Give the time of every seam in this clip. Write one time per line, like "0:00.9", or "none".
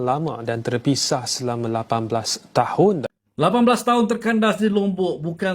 0:03.2